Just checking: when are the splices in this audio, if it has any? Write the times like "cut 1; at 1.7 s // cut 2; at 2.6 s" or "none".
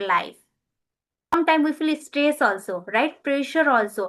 cut 1; at 1.3 s

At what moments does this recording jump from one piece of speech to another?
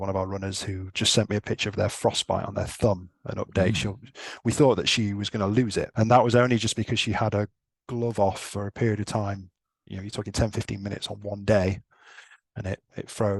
cut 1; at 5.9 s

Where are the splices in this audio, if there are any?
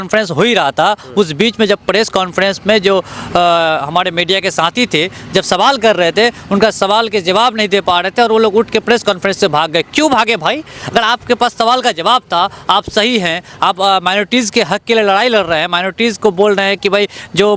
none

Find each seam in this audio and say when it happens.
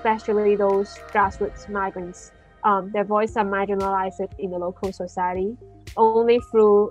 none

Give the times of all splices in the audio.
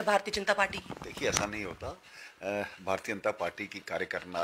none

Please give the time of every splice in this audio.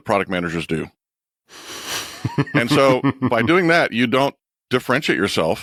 none

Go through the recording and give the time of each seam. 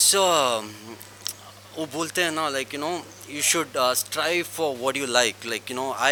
none

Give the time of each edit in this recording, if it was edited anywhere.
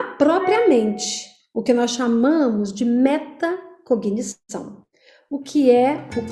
none

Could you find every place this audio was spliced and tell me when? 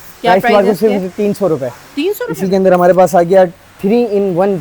cut 1; at 2.3 s

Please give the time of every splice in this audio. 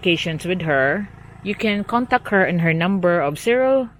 none

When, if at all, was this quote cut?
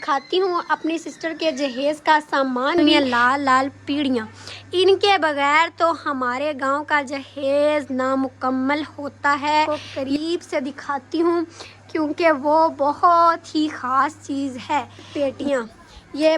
cut 1; at 2.8 s // cut 2; at 9.7 s // cut 3; at 15.0 s

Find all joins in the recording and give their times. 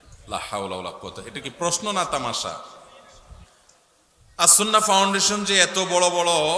cut 1; at 3.6 s

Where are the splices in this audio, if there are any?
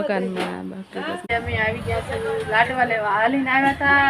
cut 1; at 1.3 s

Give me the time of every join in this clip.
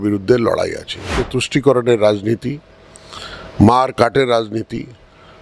cut 1; at 1.2 s

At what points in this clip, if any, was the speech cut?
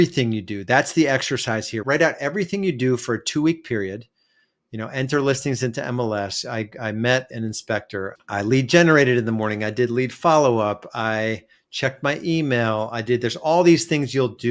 cut 1; at 8.2 s

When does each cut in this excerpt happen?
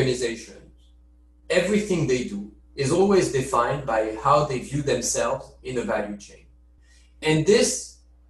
cut 1; at 7.2 s

